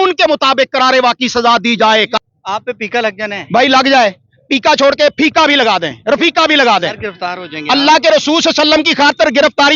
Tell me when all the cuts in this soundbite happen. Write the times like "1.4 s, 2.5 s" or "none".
2.2 s